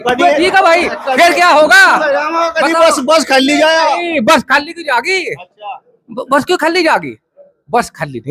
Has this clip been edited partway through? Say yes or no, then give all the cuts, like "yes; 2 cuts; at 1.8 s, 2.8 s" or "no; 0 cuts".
no; 0 cuts